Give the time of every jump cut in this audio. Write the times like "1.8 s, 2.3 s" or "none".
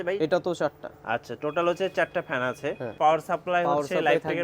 2.9 s